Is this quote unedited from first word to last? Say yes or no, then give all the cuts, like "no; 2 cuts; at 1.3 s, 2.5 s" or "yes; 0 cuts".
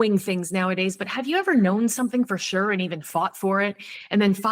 yes; 0 cuts